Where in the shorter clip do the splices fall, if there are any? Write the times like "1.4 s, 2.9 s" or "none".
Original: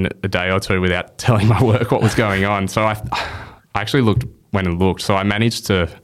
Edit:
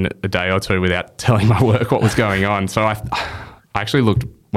none